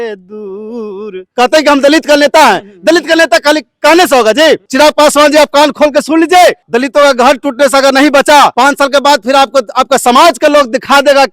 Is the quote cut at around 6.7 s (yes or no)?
yes